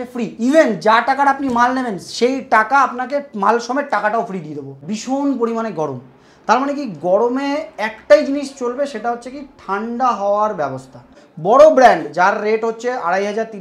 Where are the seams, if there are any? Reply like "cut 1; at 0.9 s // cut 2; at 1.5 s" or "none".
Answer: cut 1; at 4.8 s // cut 2; at 11.2 s